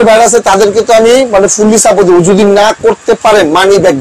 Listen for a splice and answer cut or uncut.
uncut